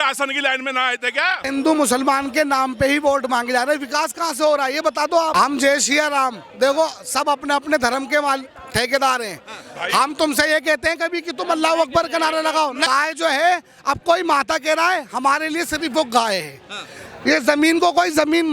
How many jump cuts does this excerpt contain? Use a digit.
3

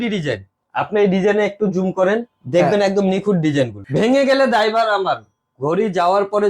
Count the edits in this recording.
1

